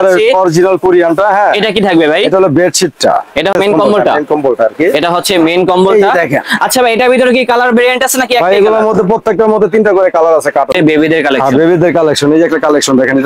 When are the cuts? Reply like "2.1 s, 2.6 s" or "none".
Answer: 3.5 s, 10.8 s